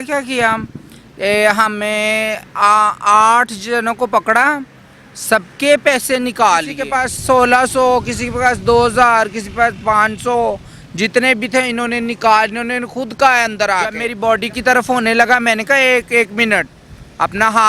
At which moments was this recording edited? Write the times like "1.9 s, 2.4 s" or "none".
6.8 s, 14.1 s